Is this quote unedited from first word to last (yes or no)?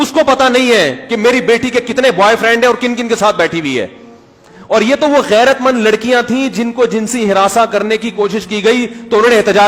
yes